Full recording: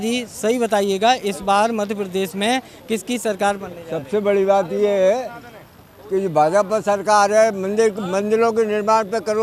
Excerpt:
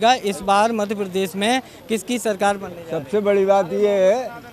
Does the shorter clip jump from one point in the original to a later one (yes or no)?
no